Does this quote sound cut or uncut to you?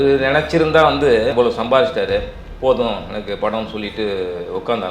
cut